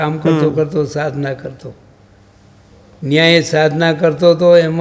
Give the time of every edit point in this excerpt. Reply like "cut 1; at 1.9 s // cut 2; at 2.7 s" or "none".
none